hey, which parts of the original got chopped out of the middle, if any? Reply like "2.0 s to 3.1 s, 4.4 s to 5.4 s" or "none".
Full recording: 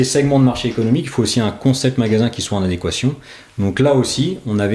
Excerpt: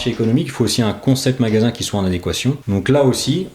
3.2 s to 3.5 s